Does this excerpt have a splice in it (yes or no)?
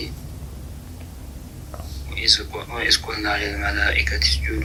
no